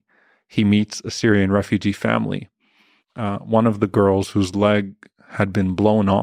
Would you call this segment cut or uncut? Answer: uncut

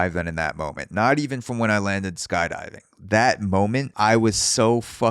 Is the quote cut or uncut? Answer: cut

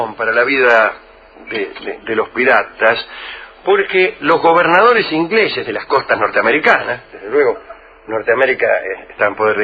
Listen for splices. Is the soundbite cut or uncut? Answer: cut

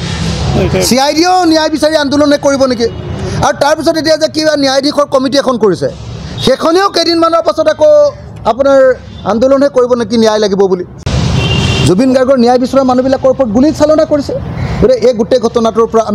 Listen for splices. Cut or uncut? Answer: cut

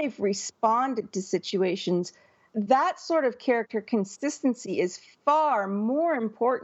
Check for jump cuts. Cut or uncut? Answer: cut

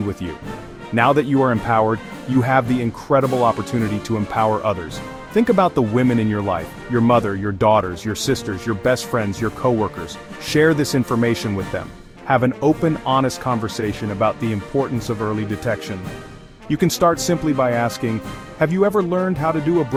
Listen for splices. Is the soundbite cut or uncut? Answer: uncut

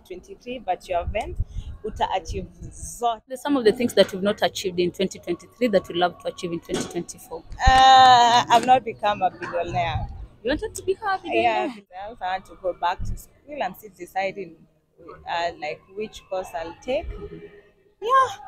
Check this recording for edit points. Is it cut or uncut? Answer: cut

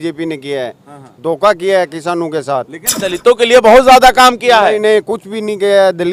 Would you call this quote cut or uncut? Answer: uncut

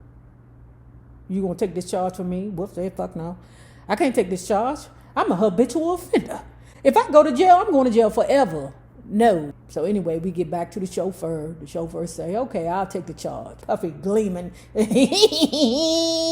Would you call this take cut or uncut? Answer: cut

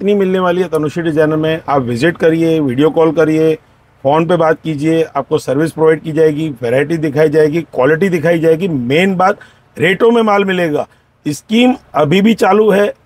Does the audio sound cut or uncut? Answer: uncut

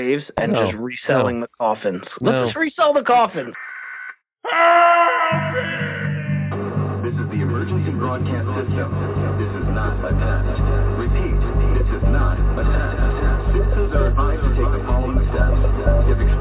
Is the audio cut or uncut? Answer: cut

